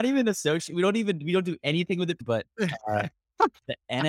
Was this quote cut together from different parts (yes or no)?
yes